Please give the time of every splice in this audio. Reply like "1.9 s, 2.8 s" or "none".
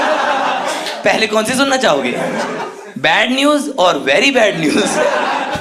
none